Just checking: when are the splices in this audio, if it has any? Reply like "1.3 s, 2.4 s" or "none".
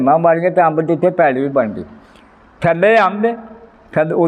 none